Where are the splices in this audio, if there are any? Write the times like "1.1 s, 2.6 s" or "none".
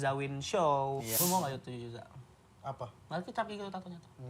1.1 s